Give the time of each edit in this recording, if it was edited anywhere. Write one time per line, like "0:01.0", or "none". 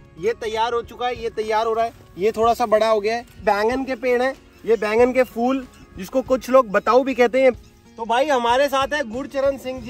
0:03.4
0:07.5